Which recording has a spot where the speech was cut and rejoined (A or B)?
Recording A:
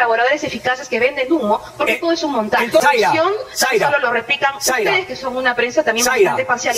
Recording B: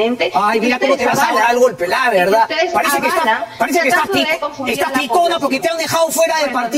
A